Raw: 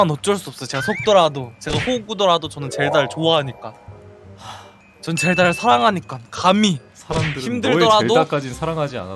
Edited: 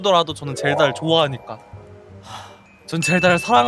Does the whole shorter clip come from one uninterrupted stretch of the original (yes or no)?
yes